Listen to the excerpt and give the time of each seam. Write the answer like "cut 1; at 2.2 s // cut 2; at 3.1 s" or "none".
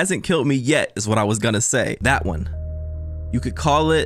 none